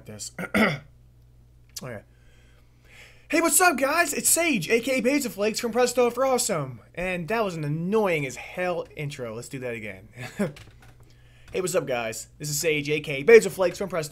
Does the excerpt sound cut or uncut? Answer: uncut